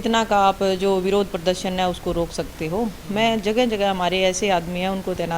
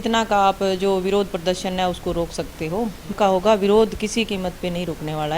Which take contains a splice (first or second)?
second